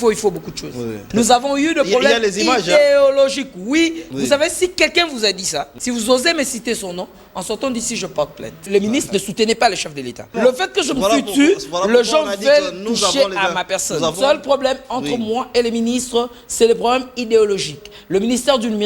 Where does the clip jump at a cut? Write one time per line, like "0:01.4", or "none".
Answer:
0:01.0
0:04.0
0:05.7
0:08.7
0:10.3
0:14.1